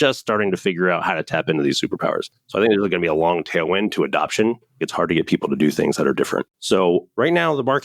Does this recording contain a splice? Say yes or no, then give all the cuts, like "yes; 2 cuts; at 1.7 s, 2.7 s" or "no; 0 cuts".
yes; 2 cuts; at 4.8 s, 6.7 s